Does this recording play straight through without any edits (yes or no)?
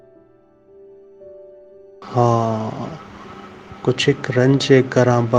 yes